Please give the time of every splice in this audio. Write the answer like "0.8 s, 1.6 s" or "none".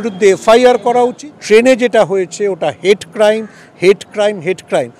1.3 s